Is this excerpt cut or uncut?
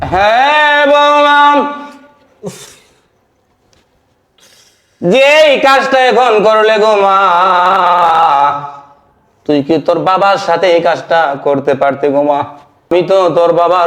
cut